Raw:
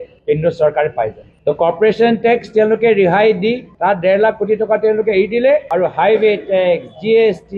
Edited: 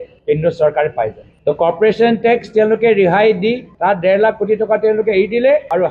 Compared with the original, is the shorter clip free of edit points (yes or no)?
yes